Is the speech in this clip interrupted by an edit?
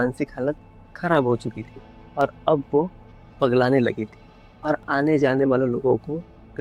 no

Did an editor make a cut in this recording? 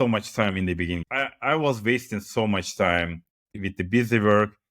yes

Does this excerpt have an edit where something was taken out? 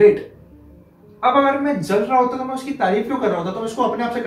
no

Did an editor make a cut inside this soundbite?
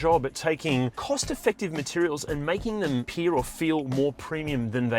yes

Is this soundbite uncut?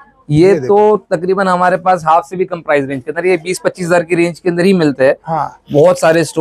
yes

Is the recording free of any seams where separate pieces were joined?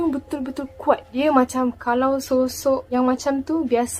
no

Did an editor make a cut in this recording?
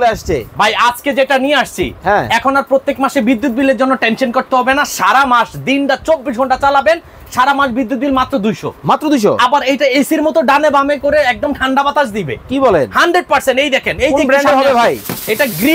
no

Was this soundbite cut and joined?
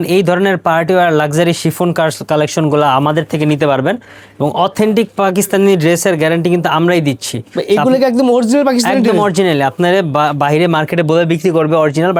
no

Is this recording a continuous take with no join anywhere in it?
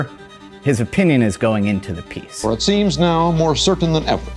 no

